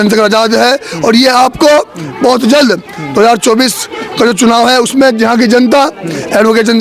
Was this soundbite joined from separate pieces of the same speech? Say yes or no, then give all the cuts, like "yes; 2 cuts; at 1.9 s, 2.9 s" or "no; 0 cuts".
no; 0 cuts